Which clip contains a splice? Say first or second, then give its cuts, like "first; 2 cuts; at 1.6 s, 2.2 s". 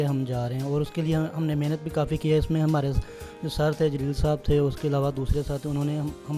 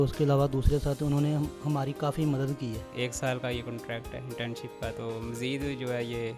second; 1 cut; at 2.8 s